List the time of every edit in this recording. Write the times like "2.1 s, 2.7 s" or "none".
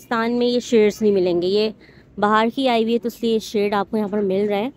none